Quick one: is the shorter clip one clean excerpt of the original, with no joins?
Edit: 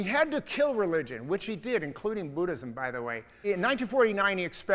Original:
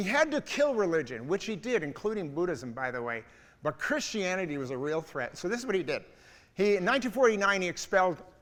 no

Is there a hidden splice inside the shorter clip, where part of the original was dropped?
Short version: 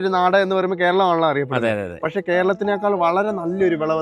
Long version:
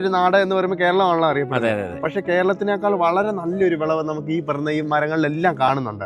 no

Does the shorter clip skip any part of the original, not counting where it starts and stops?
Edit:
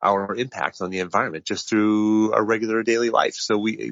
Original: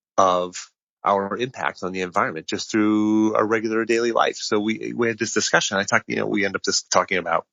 no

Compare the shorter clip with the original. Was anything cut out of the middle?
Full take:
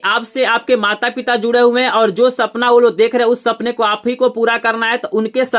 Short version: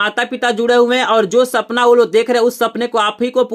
no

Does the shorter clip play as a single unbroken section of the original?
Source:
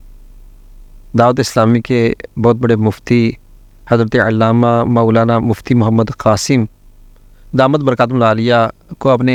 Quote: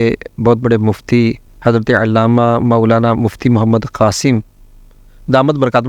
no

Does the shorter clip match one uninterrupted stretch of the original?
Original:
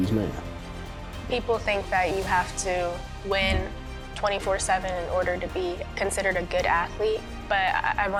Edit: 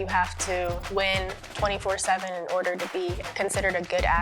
no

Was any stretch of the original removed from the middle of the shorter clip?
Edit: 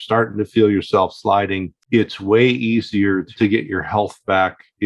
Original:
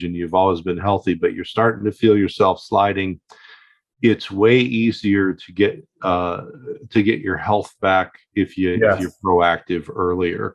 yes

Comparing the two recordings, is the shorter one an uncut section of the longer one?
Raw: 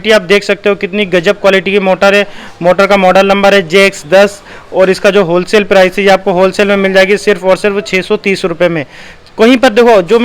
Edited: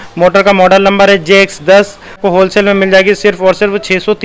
no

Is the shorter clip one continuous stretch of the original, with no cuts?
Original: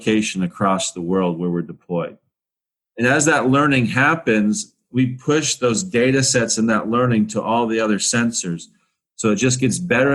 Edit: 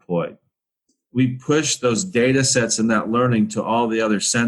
no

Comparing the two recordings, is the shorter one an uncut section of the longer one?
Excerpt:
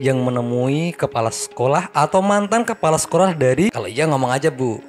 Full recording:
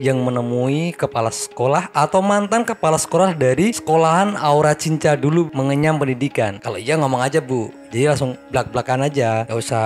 no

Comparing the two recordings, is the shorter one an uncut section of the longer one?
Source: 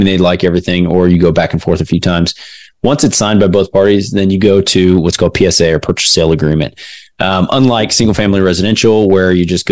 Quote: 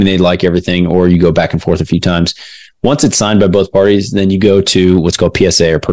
yes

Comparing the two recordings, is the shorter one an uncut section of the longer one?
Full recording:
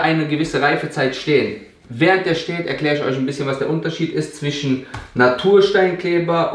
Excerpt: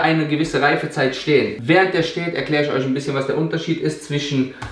no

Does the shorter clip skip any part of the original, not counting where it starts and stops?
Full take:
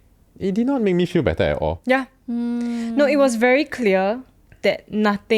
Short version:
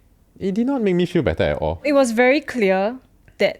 yes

